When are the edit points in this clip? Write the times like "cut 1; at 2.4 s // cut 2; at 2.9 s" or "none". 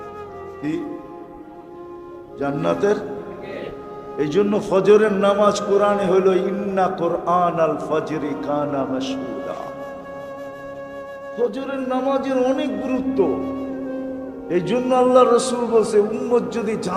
none